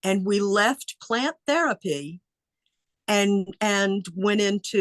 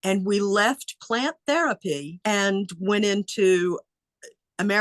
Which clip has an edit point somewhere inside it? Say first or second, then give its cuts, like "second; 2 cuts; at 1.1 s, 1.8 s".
second; 1 cut; at 2.2 s